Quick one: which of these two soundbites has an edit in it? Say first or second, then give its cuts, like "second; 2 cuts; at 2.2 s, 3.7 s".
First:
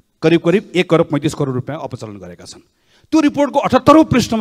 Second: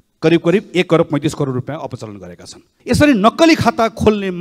second; 1 cut; at 2.7 s